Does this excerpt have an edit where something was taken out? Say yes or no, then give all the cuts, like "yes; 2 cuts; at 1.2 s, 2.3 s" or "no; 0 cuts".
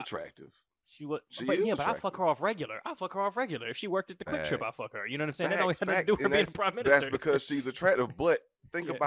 no; 0 cuts